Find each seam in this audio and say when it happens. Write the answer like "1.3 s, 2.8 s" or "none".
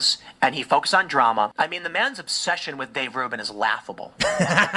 1.5 s